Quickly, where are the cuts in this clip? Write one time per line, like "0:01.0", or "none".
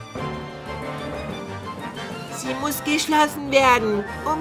0:02.4

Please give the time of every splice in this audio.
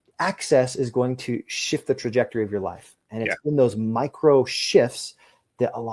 none

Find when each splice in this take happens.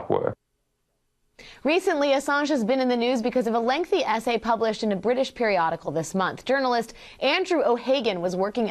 0:02.8

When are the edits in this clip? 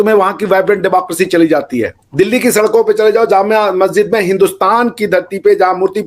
0:02.0

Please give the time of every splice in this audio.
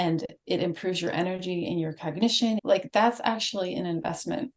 0:02.6

